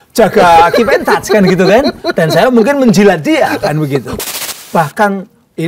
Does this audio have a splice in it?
yes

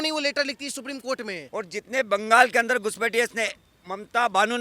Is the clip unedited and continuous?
no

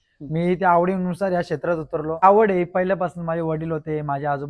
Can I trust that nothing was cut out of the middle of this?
no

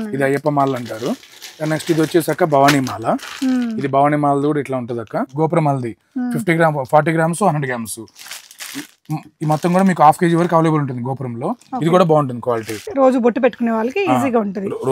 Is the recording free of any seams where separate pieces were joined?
no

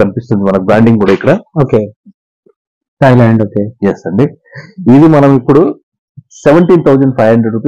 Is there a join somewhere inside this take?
no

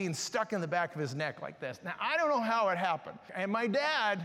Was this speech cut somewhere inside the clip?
yes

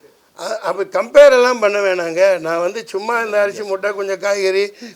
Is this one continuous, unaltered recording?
yes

